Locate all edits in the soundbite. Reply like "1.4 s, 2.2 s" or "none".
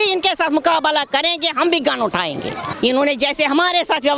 2.7 s